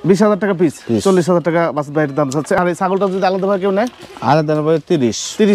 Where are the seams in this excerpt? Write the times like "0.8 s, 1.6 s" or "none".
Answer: none